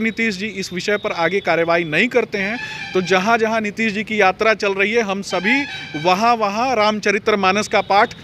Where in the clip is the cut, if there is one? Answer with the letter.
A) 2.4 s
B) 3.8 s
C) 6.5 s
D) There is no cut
D